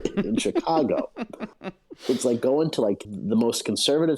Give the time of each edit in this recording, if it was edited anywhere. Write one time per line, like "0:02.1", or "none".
0:03.1